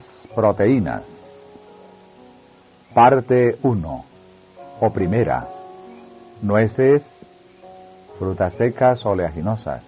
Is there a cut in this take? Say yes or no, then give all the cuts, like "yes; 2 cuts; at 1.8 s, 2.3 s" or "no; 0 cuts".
no; 0 cuts